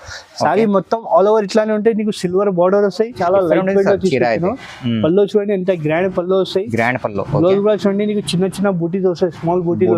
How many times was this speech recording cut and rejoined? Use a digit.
1